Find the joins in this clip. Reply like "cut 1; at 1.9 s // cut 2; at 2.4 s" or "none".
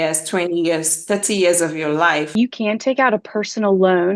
cut 1; at 2.3 s